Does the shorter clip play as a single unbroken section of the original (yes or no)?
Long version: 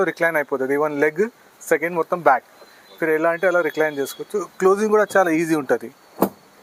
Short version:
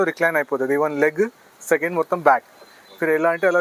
yes